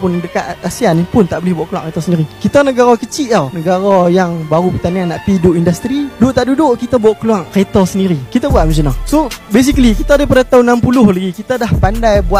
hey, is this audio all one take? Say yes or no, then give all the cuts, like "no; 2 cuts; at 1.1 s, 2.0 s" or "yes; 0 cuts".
yes; 0 cuts